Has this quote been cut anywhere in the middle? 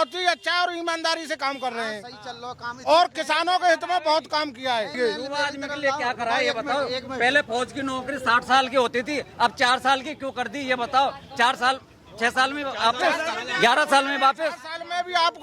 no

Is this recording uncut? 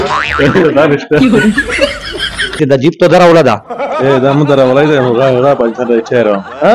no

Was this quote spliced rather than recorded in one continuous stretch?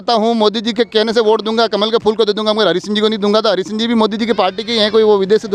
no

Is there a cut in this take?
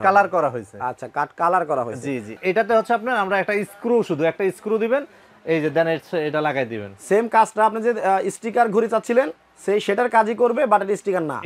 yes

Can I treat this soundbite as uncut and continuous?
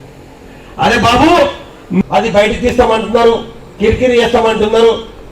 no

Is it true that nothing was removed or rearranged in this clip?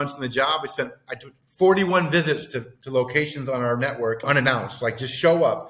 no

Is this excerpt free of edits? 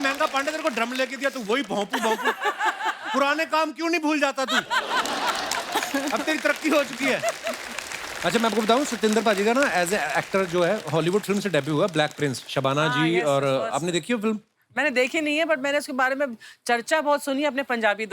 yes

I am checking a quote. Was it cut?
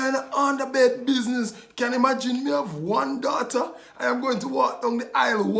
no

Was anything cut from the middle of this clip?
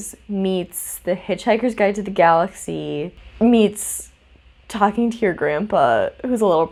no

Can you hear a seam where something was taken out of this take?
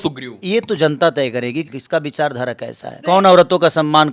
yes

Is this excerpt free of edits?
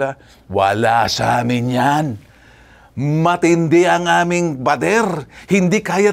yes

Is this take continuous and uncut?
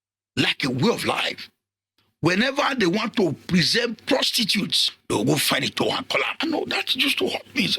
no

